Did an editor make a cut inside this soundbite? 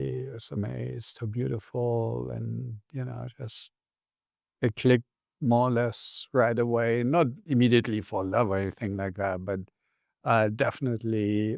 no; 0 cuts

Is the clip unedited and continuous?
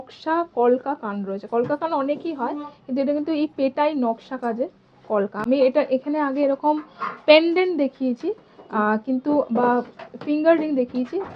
yes; 0 cuts

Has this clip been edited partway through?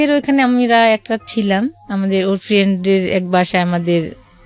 no; 0 cuts

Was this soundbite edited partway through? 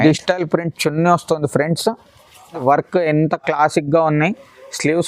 yes; 1 cut; at 2.6 s

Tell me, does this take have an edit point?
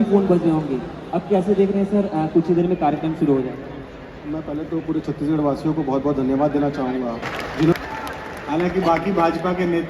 yes; 1 cut; at 7.7 s

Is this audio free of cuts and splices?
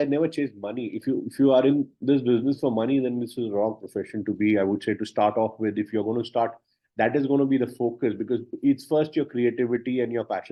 yes; 0 cuts

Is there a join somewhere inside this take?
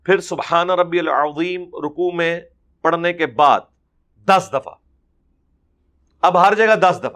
no; 0 cuts

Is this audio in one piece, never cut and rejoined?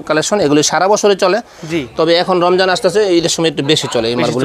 yes; 0 cuts

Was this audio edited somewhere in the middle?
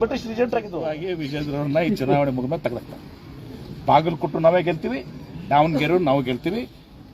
yes; 1 cut; at 1.1 s

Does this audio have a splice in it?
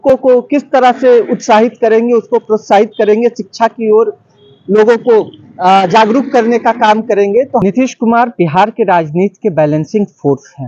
yes; 1 cut; at 7.6 s

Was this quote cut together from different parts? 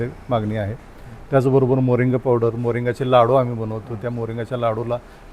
no; 0 cuts

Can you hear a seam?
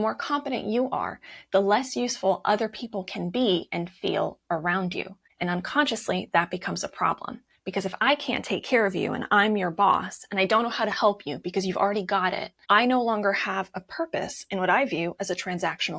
no; 0 cuts

